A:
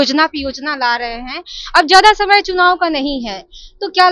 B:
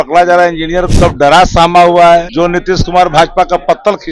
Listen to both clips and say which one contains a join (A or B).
B